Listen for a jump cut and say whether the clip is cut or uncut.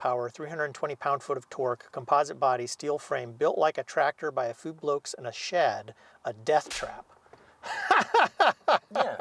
uncut